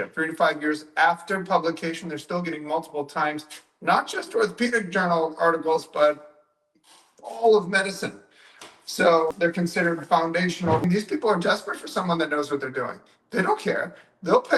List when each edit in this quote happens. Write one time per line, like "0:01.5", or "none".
0:10.8